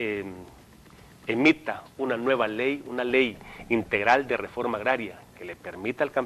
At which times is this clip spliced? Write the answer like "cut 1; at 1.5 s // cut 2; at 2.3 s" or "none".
none